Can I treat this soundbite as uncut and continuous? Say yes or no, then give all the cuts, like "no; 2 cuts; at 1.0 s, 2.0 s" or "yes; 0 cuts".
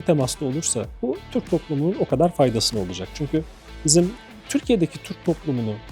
no; 1 cut; at 0.9 s